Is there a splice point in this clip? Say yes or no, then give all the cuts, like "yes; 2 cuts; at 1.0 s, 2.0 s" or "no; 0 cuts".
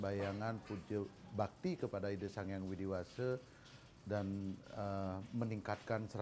no; 0 cuts